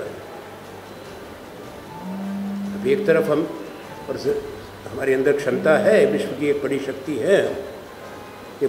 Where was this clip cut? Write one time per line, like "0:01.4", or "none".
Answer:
none